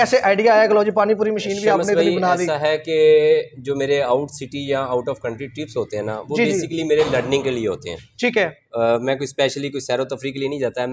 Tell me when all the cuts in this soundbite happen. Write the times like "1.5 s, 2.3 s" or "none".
none